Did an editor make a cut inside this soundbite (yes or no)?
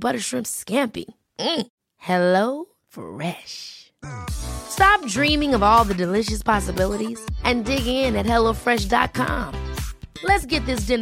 no